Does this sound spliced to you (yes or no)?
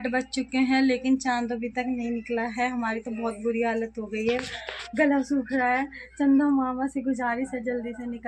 no